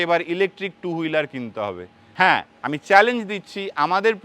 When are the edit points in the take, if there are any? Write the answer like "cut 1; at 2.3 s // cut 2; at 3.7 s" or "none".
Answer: cut 1; at 2.0 s